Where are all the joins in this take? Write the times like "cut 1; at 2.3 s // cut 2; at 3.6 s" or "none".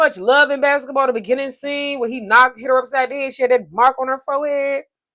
none